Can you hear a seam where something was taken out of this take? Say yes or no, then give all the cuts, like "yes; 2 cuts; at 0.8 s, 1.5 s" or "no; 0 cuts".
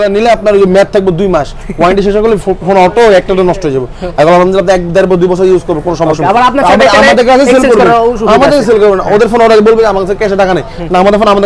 no; 0 cuts